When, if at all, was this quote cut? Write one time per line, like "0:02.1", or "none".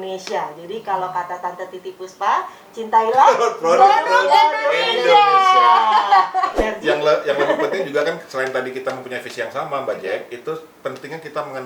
0:06.6